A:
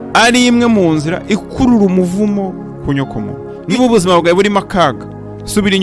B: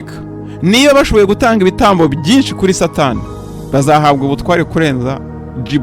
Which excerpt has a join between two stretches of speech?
A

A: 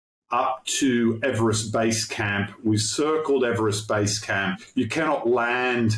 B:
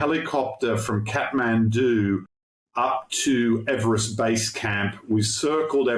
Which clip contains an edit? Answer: A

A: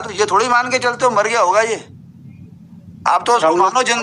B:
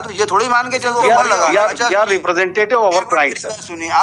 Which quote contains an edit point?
B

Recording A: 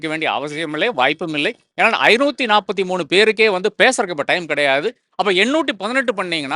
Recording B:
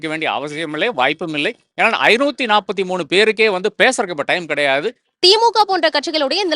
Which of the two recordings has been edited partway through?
B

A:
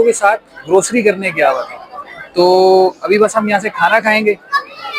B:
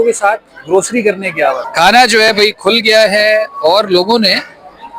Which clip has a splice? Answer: B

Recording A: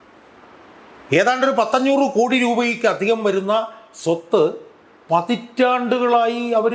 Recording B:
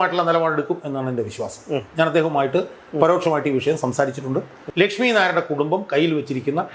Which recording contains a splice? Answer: B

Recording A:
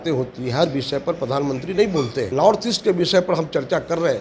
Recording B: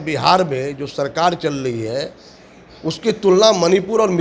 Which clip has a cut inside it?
A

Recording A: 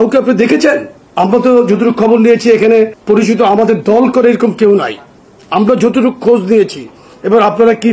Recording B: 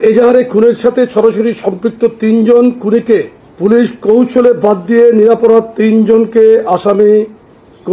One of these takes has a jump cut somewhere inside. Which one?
A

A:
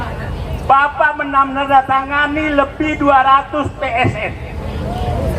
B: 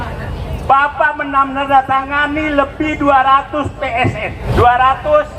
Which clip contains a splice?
B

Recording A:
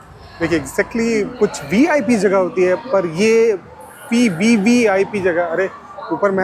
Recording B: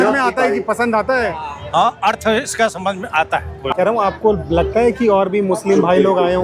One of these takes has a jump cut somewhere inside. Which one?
B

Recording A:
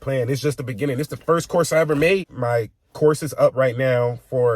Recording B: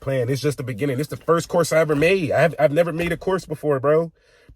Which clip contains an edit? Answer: A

